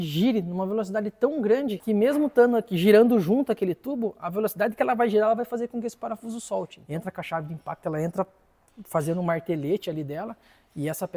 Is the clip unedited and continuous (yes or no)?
no